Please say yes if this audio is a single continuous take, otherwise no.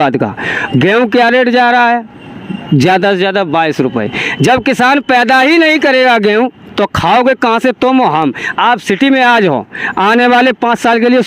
yes